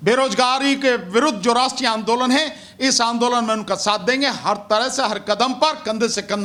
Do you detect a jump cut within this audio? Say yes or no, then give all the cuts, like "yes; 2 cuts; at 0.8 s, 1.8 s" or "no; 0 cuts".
no; 0 cuts